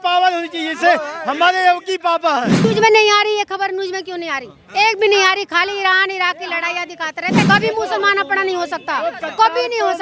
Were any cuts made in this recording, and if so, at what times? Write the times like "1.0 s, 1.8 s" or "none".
2.5 s, 7.5 s